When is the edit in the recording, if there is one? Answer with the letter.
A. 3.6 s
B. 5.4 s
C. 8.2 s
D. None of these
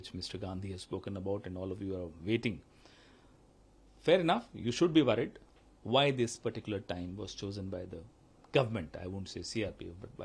B